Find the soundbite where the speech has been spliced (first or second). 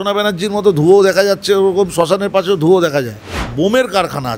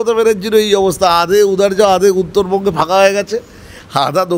first